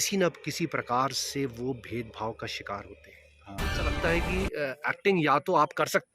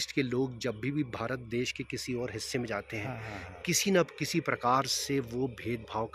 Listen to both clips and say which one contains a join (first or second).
first